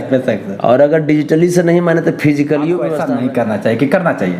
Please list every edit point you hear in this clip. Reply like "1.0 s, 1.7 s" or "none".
3.0 s